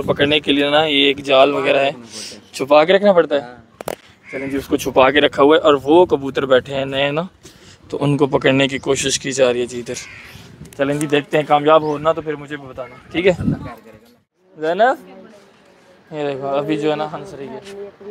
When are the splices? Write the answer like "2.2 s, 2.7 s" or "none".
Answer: none